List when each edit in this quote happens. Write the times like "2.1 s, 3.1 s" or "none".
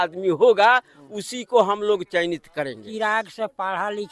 2.9 s